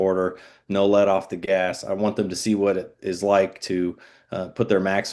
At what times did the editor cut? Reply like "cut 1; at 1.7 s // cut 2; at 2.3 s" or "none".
none